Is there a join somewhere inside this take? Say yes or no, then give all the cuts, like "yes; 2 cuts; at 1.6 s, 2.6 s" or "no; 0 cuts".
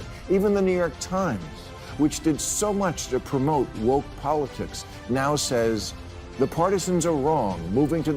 no; 0 cuts